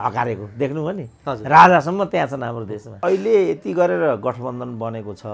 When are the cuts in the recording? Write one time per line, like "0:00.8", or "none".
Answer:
0:03.0